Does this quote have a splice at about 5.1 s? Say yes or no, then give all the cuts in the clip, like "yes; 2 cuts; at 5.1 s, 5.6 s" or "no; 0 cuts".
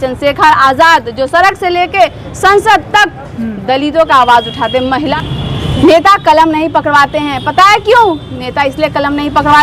yes; 1 cut; at 5.1 s